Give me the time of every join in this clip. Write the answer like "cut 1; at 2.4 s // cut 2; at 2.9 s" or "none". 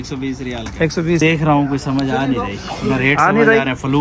cut 1; at 1.2 s